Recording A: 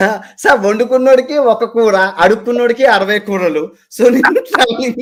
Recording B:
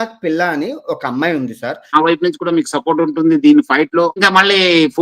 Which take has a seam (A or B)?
B